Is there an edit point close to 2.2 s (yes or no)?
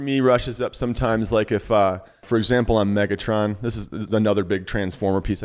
yes